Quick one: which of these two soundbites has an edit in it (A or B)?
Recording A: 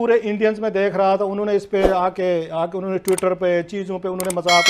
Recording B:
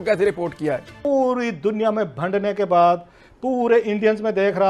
B